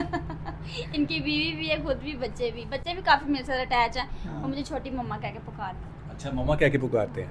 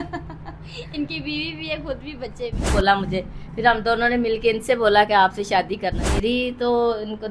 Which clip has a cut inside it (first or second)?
second